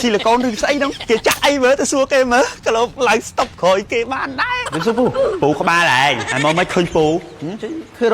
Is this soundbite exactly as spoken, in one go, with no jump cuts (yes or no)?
no